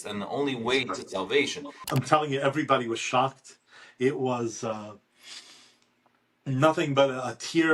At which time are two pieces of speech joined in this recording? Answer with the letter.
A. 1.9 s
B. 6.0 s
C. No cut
A